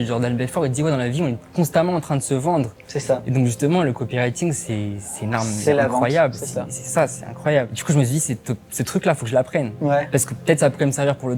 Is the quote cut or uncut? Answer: uncut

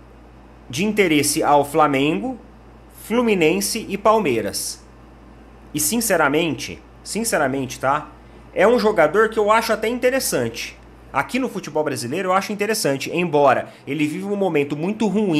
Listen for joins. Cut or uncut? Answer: uncut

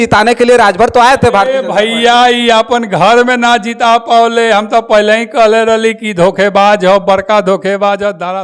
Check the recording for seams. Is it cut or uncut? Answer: uncut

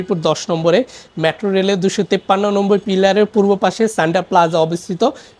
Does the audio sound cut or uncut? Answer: uncut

